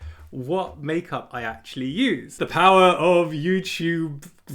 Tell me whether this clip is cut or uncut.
cut